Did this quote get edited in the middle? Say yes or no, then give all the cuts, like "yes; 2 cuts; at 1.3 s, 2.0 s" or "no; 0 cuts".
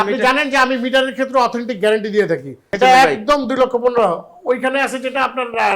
yes; 1 cut; at 2.6 s